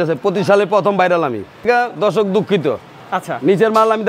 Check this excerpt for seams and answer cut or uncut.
cut